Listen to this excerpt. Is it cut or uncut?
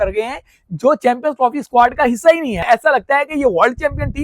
cut